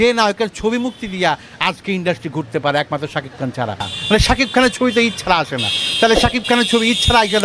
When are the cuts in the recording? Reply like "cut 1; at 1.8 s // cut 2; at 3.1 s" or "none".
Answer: cut 1; at 3.9 s